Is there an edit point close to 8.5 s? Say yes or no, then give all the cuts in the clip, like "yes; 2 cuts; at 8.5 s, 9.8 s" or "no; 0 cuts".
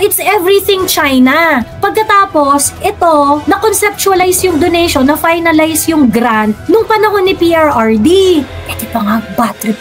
yes; 1 cut; at 8.5 s